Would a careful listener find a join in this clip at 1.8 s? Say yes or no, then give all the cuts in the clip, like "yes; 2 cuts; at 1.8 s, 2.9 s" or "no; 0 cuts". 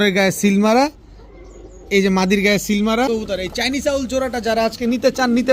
no; 1 cut; at 3.1 s